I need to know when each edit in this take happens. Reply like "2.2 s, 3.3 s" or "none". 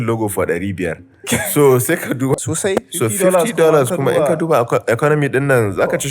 2.3 s